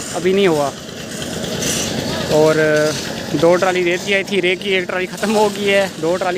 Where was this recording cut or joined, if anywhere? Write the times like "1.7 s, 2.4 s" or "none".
none